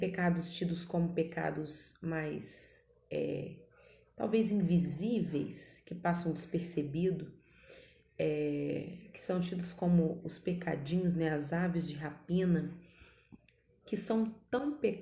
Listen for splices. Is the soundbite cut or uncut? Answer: uncut